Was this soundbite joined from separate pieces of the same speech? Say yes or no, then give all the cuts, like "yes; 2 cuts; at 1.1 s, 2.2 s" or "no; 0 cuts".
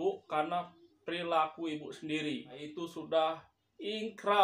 yes; 1 cut; at 2.7 s